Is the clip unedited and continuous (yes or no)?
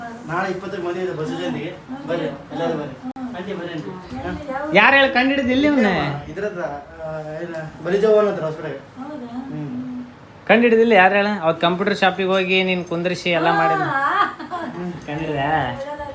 yes